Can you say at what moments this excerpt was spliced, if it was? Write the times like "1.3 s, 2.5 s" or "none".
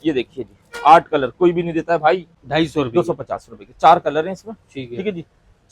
2.3 s